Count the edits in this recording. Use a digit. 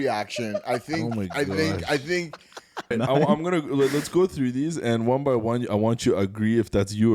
1